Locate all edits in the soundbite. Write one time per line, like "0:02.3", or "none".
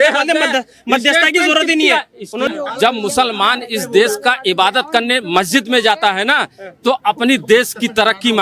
0:02.5